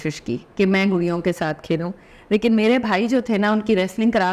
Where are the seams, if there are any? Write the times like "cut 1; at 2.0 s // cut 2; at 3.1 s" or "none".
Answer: none